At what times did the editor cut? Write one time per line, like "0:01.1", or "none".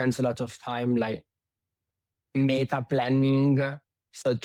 none